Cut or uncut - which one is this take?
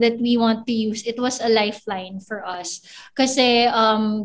uncut